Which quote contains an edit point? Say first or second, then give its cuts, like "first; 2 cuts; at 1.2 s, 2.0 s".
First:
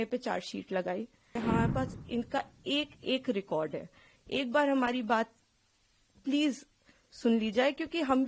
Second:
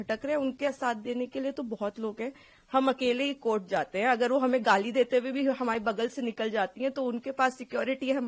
first; 1 cut; at 1.4 s